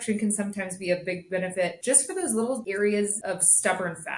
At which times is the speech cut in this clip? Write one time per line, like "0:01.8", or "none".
0:01.8
0:02.6
0:03.2

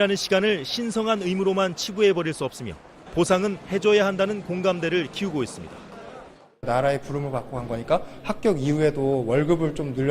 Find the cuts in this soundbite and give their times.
0:01.9

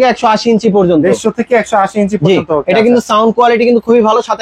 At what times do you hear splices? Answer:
none

